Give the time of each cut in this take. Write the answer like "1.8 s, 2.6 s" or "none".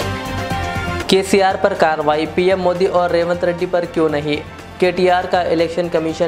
1.0 s